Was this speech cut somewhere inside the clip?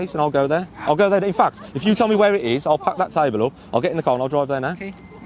no; 0 cuts

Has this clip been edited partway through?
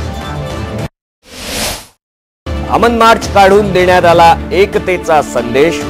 yes; 1 cut; at 2.6 s

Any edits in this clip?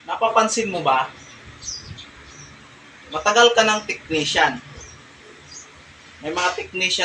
no; 0 cuts

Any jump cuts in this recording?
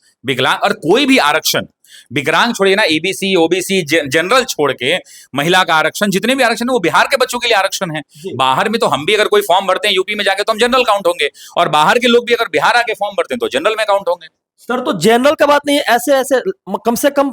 no; 0 cuts

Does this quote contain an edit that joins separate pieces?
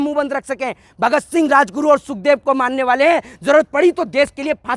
no; 0 cuts

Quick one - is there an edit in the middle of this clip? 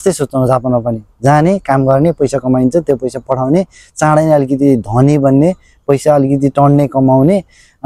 no; 0 cuts

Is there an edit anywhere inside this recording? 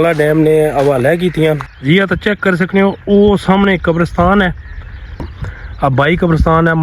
yes; 2 cuts; at 1.7 s, 5.3 s

